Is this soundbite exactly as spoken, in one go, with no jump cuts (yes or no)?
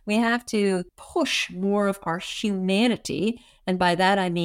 no